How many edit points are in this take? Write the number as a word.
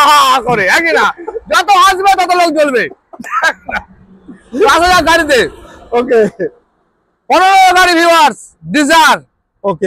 zero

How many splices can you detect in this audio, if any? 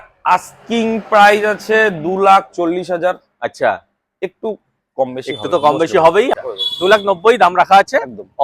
one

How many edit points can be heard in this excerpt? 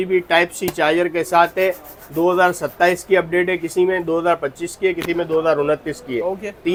zero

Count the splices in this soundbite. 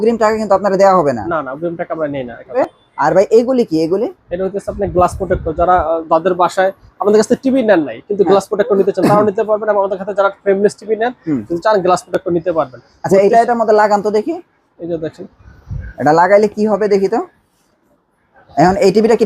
one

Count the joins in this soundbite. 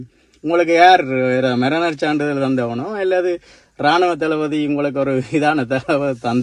zero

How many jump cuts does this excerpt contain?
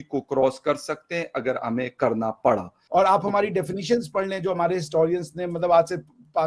one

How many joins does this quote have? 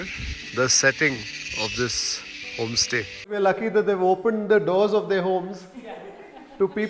one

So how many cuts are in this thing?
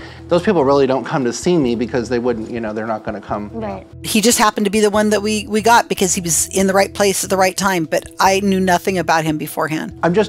zero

